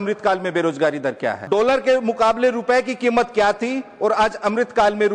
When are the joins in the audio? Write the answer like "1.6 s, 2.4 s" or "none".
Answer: 1.4 s